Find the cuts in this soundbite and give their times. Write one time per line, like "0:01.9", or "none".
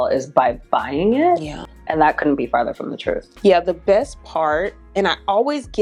none